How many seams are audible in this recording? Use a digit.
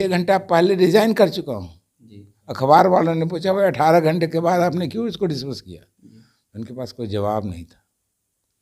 0